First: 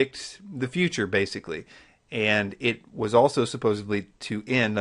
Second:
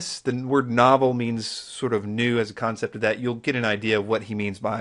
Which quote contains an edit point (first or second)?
first